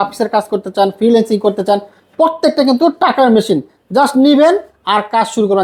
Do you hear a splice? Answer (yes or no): no